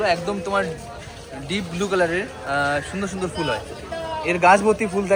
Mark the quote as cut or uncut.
uncut